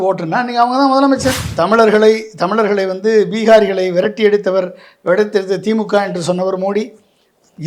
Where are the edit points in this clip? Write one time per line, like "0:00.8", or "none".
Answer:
0:01.4